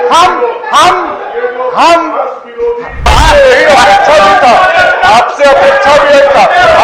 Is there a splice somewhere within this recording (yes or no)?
yes